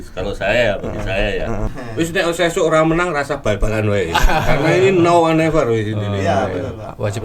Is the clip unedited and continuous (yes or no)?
no